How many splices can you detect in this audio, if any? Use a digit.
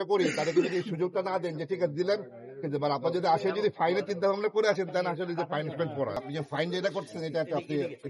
1